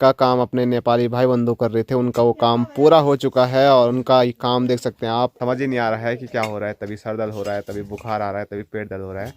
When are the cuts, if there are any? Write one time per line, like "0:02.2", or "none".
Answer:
0:05.3